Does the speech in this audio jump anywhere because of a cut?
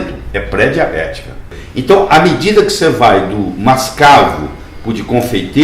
yes; 1 cut; at 1.5 s

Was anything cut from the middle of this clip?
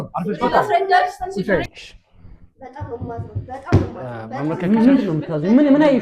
yes; 1 cut; at 1.6 s

